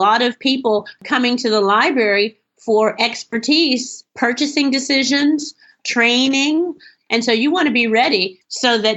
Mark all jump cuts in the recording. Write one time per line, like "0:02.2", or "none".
0:00.9